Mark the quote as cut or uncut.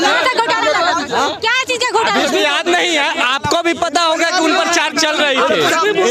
uncut